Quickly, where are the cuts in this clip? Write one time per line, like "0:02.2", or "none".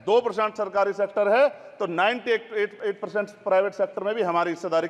none